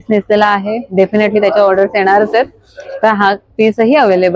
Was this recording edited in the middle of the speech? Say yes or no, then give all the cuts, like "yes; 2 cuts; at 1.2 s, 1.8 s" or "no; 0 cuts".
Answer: no; 0 cuts